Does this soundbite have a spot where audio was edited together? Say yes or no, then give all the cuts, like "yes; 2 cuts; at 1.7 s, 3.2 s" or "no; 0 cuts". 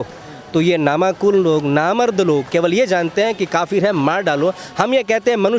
yes; 1 cut; at 2.5 s